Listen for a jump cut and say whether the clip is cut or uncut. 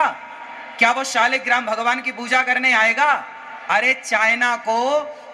uncut